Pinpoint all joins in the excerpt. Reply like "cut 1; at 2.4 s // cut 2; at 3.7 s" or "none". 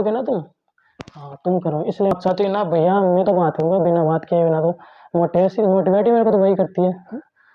cut 1; at 2.1 s